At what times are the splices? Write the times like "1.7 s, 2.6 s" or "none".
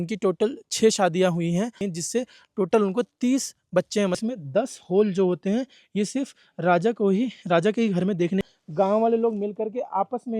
1.8 s, 4.2 s, 8.4 s